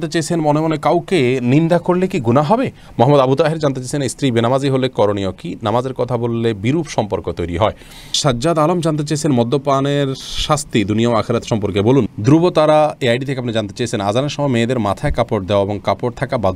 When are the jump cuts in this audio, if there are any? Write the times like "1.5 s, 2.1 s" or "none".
2.8 s, 8.1 s, 12.1 s